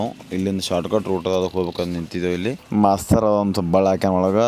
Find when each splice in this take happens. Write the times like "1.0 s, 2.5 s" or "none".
2.6 s